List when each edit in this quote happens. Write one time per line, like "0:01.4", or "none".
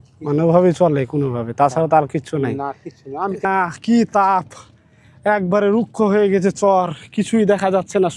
0:03.4